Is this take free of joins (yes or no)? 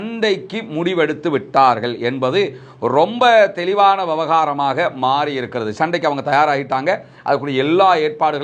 yes